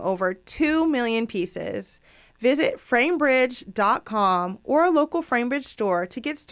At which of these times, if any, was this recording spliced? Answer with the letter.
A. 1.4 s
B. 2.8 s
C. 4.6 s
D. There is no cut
D